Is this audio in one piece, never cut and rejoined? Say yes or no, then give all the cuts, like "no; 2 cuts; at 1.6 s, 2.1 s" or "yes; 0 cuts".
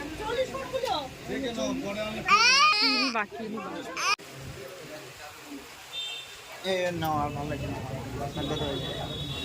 no; 2 cuts; at 2.7 s, 4.3 s